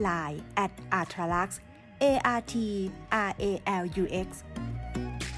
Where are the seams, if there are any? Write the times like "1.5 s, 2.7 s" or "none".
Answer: 4.4 s